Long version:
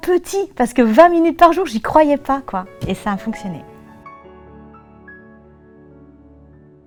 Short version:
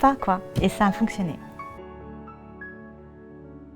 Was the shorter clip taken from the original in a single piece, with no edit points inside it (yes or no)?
no